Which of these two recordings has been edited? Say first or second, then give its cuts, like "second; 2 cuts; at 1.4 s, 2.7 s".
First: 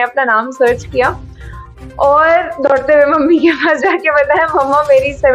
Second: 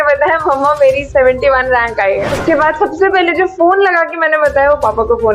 second; 1 cut; at 2.3 s